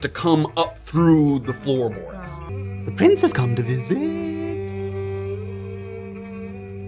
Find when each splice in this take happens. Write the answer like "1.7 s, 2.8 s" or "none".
2.4 s